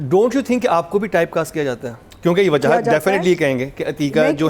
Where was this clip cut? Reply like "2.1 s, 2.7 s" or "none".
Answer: none